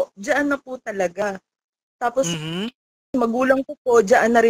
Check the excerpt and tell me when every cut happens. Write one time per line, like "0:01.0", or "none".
none